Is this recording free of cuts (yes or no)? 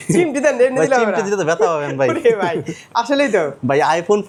yes